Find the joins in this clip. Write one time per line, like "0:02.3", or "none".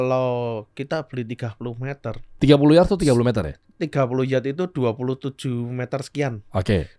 0:02.3